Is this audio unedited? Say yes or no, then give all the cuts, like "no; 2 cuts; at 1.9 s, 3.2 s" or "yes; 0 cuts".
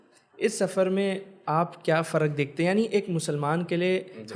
yes; 0 cuts